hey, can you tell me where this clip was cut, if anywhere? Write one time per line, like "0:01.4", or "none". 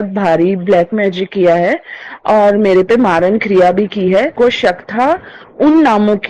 0:04.3